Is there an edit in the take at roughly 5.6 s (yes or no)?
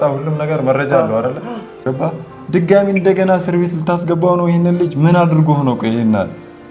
no